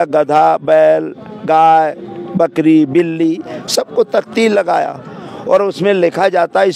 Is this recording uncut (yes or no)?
yes